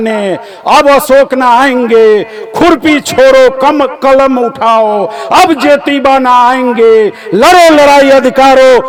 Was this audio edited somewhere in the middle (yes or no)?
no